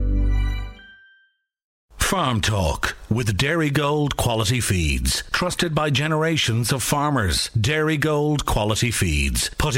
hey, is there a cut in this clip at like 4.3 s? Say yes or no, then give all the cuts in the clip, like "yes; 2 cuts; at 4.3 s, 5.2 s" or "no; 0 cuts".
no; 1 cut; at 1.9 s